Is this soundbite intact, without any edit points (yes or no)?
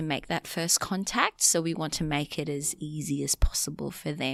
yes